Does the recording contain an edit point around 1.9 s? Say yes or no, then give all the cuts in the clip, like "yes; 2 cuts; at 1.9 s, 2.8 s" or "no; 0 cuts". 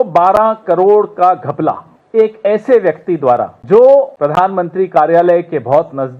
yes; 3 cuts; at 1.9 s, 3.6 s, 4.1 s